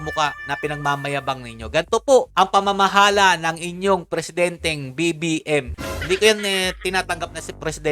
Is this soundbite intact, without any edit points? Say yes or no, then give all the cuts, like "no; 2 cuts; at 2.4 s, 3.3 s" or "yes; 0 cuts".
yes; 0 cuts